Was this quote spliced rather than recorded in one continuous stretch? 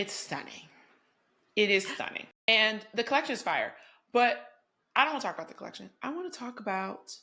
yes; 1 cut; at 2.5 s

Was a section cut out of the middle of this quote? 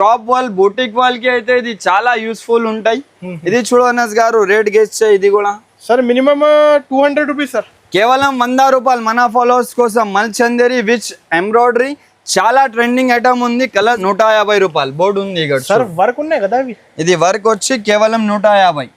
yes; 1 cut; at 14.0 s

